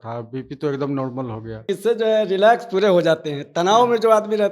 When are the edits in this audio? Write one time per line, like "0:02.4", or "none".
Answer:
0:01.7